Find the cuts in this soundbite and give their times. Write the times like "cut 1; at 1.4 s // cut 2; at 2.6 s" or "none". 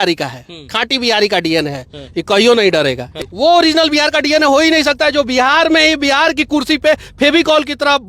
cut 1; at 3.1 s